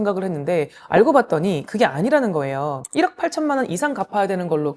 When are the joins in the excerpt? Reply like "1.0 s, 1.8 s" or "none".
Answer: 2.8 s